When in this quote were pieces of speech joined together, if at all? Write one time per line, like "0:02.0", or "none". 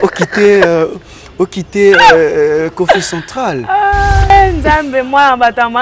0:04.3